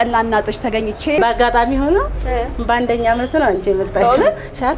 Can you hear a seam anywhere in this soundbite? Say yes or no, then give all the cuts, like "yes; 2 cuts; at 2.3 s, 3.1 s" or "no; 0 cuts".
yes; 1 cut; at 1.2 s